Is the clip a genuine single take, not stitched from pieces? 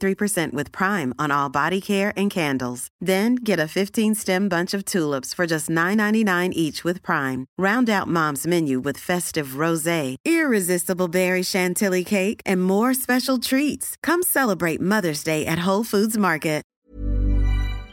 no; 1 cut; at 16.7 s

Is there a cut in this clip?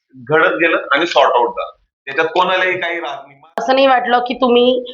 yes; 1 cut; at 3.6 s

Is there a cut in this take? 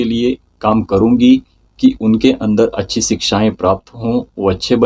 no; 0 cuts

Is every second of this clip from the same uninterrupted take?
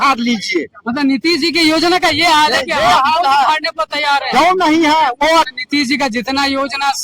no; 1 cut; at 5.5 s

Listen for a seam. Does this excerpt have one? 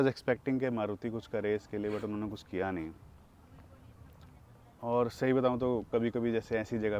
no; 0 cuts

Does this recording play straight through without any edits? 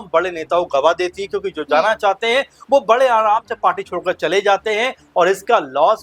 yes; 0 cuts

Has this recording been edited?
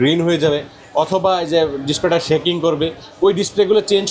no; 0 cuts

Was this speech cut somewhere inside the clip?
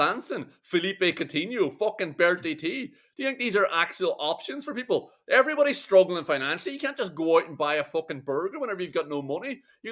no; 0 cuts

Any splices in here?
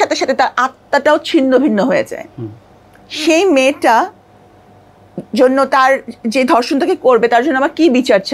no; 0 cuts

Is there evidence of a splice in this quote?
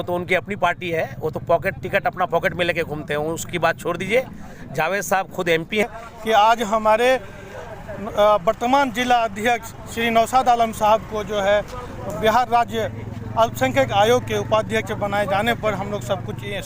yes; 1 cut; at 5.9 s

